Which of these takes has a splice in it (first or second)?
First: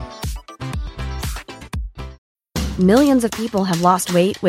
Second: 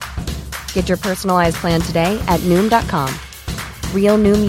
first